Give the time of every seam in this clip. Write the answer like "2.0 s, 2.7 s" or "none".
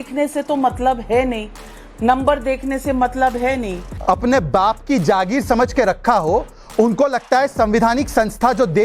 3.9 s